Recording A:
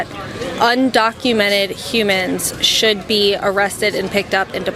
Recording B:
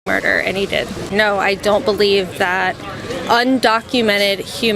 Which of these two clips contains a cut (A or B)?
B